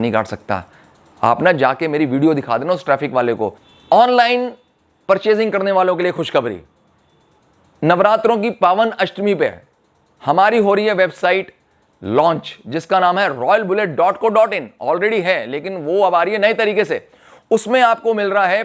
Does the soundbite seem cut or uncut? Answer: cut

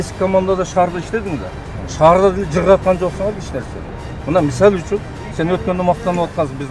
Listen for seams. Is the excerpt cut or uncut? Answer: uncut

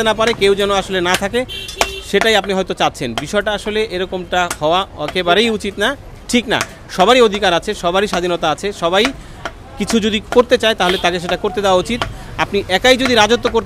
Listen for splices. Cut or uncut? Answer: uncut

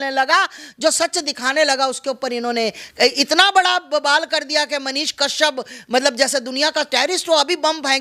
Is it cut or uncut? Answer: uncut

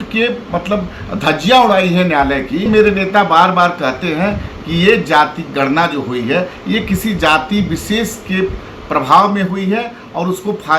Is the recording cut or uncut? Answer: cut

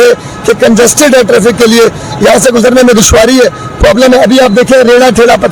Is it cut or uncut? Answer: uncut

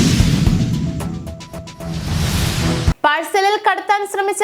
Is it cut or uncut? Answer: cut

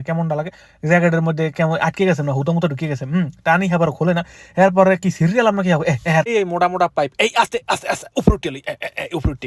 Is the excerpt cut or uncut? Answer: cut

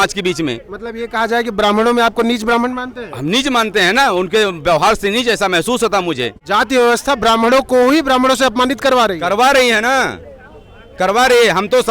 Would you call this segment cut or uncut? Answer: cut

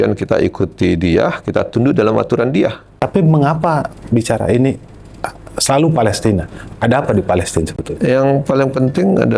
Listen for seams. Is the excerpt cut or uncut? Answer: cut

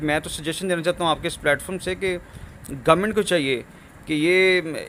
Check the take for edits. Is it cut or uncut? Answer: uncut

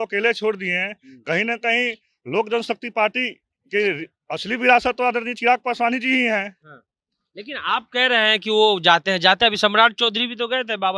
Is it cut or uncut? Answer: uncut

